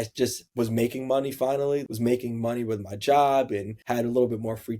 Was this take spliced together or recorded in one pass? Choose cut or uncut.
cut